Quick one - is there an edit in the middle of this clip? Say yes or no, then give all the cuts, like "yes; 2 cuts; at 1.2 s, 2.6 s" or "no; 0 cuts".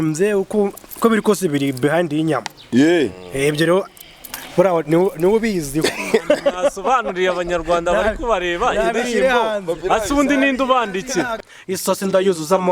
yes; 1 cut; at 11.5 s